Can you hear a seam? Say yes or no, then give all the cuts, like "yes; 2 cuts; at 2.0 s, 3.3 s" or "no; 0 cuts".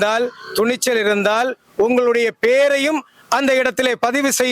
no; 0 cuts